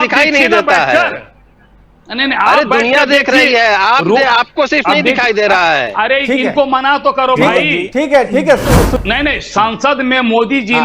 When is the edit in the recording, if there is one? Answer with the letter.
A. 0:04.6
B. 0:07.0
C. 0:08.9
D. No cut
C